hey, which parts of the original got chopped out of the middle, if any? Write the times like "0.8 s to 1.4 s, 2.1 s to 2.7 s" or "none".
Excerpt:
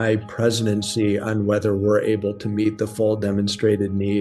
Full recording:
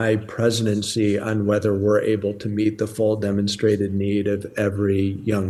none